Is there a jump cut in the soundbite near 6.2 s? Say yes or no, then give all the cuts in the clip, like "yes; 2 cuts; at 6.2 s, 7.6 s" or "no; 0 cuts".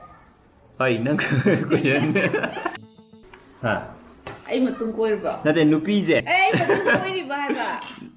yes; 2 cuts; at 2.9 s, 6.2 s